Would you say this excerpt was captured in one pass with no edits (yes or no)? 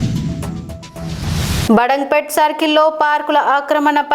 no